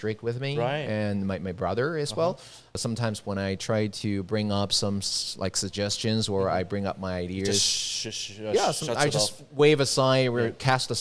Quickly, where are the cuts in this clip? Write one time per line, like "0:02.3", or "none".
0:02.8